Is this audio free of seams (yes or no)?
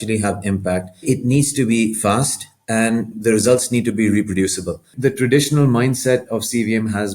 no